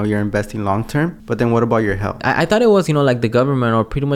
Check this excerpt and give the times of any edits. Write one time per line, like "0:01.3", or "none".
0:01.2
0:02.2